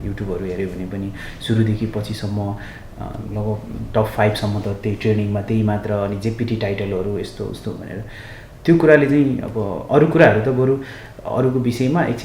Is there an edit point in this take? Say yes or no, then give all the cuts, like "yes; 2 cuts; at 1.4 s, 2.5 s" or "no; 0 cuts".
no; 0 cuts